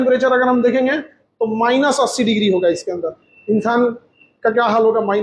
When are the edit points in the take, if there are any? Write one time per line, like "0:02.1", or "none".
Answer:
none